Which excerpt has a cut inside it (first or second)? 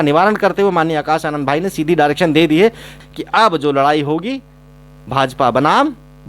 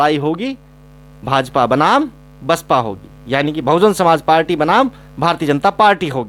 first